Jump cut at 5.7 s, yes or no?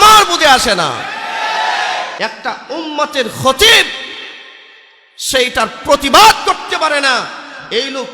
no